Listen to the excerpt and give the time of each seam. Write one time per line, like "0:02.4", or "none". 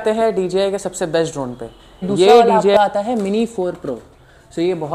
0:02.6